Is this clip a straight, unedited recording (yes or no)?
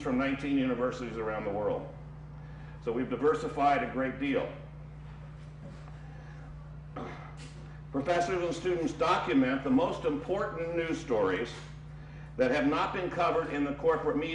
yes